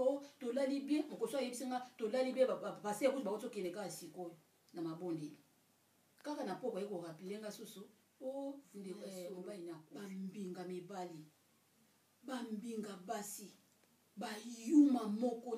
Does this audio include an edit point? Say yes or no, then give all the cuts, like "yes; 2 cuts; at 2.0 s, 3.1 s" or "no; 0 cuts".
yes; 1 cut; at 9.9 s